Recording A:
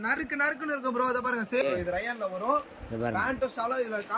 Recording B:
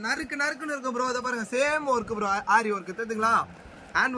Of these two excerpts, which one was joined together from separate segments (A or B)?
A